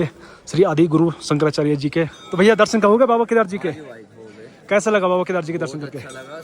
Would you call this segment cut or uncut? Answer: cut